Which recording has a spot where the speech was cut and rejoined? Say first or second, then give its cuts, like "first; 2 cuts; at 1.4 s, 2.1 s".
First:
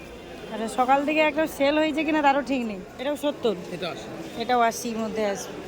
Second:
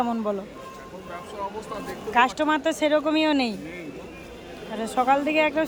first; 1 cut; at 2.9 s